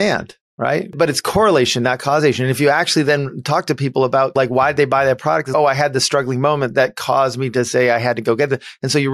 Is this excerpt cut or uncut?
cut